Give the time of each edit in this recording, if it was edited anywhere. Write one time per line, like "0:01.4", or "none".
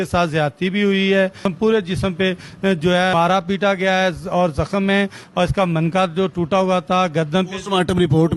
0:01.4
0:03.1

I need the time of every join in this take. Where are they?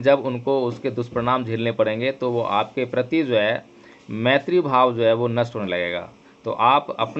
none

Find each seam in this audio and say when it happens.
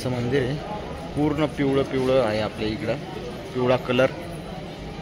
none

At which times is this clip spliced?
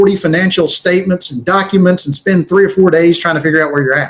none

